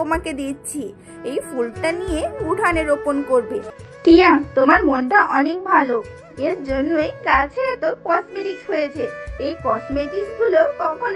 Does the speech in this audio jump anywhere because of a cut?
yes; 1 cut; at 3.7 s

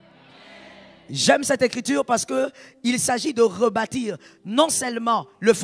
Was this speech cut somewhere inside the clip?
no; 0 cuts

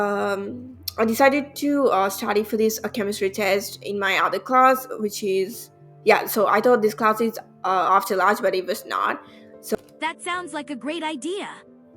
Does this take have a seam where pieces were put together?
yes; 1 cut; at 9.8 s

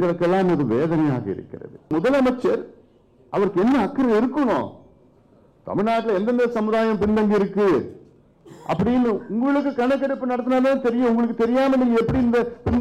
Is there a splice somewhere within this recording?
yes; 1 cut; at 1.9 s

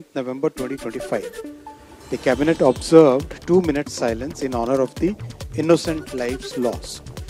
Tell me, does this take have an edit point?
no; 0 cuts

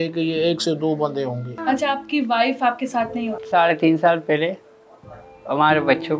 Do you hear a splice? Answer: yes; 2 cuts; at 1.5 s, 3.4 s

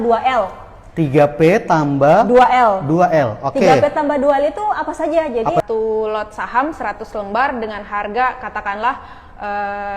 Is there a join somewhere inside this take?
yes; 1 cut; at 5.6 s

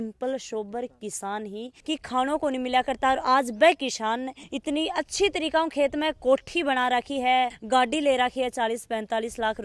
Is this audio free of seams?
no; 1 cut; at 1.8 s

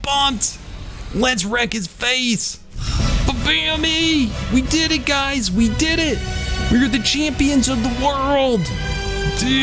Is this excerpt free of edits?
no; 1 cut; at 2.8 s

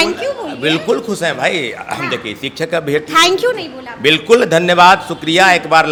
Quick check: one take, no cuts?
yes; 0 cuts

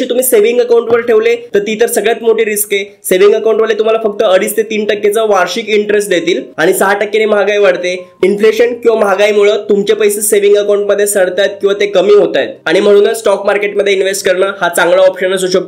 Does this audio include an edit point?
no; 0 cuts

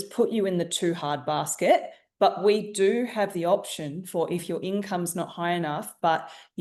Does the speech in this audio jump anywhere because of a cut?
no; 0 cuts

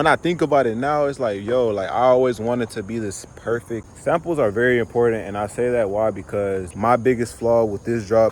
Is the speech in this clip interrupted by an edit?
yes; 2 cuts; at 3.8 s, 6.7 s

